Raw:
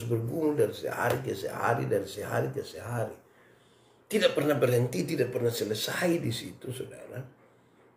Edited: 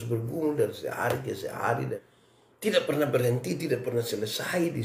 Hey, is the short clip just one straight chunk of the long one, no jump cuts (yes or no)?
no